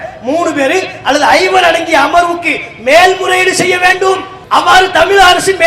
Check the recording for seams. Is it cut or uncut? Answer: cut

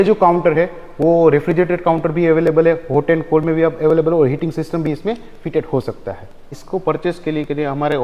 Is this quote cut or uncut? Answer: cut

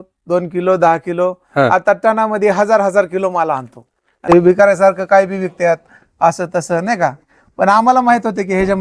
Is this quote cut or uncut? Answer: cut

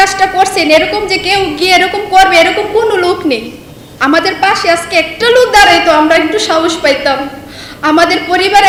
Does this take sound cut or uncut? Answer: uncut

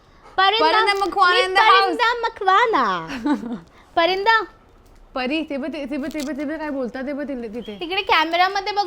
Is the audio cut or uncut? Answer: uncut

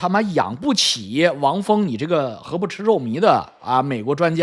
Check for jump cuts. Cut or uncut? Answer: uncut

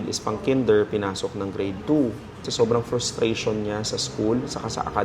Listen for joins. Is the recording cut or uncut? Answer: cut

